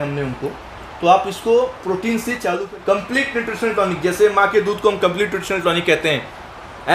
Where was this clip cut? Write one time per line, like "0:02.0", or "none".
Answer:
0:02.6